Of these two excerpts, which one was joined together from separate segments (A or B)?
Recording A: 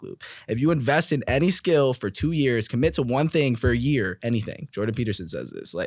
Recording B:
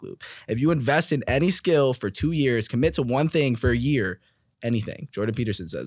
A